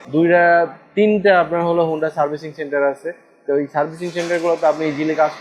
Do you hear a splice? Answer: no; 0 cuts

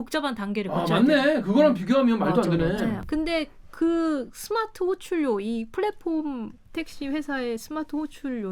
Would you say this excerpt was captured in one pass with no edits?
no; 1 cut; at 3.0 s

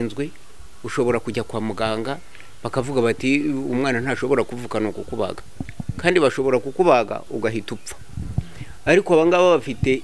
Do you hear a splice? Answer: no; 0 cuts

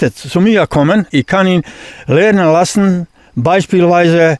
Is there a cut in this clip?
yes; 1 cut; at 1.1 s

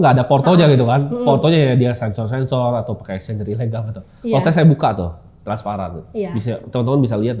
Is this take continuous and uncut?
yes; 0 cuts

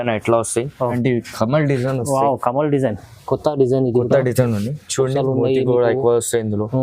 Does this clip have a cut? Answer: yes; 1 cut; at 0.9 s

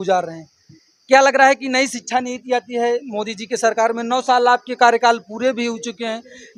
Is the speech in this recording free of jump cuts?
yes; 0 cuts

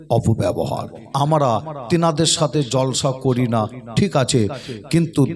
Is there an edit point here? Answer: yes; 1 cut; at 1.0 s

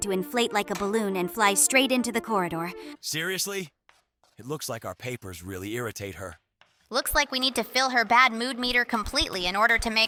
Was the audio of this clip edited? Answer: no; 0 cuts

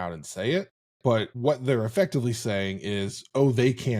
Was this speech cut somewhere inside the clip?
yes; 1 cut; at 1.3 s

